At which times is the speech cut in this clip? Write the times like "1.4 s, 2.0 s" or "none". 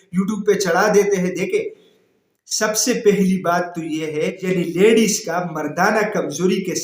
4.4 s